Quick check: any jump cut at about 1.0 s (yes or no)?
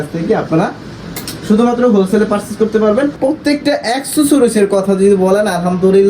no